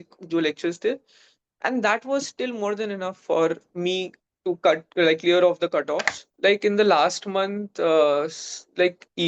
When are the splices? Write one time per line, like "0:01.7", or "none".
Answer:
0:06.3